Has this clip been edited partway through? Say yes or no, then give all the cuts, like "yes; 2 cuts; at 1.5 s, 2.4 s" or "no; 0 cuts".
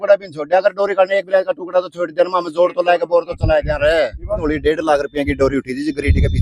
yes; 1 cut; at 4.4 s